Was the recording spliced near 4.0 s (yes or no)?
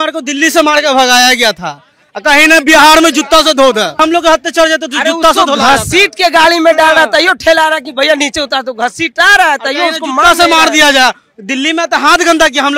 yes